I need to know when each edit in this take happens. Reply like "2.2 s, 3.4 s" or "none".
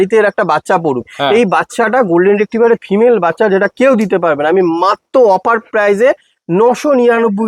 none